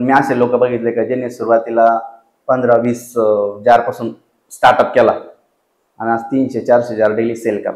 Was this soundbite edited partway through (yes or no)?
no